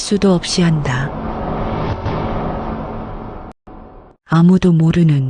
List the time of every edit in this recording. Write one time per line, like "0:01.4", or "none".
0:01.0
0:03.6